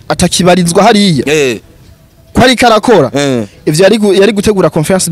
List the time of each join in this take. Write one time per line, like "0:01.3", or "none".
none